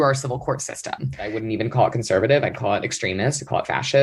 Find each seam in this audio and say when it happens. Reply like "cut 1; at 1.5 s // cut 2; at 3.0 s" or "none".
cut 1; at 1.4 s